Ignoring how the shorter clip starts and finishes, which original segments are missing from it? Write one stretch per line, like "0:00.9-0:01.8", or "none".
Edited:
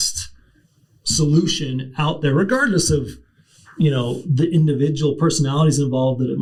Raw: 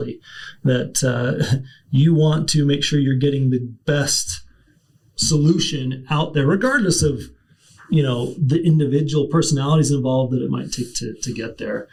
none